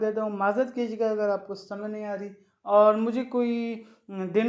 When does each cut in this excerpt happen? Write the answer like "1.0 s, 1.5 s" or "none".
none